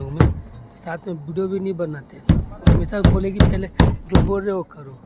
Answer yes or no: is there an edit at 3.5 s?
no